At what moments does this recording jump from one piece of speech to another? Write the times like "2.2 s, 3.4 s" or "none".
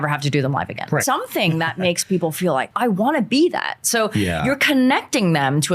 1.0 s, 2.7 s